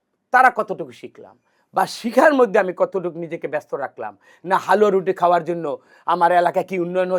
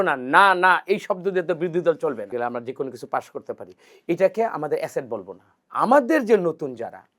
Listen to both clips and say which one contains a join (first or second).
second